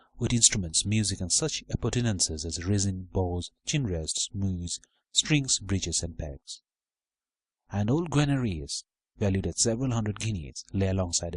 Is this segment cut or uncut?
cut